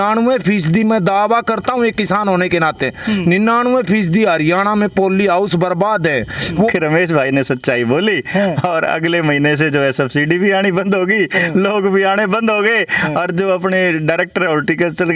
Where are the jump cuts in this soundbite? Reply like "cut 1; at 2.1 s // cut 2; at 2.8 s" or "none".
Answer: cut 1; at 6.7 s